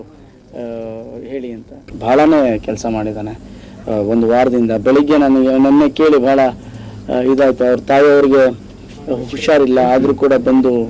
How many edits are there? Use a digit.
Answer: 1